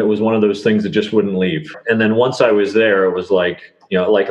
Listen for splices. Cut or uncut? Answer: cut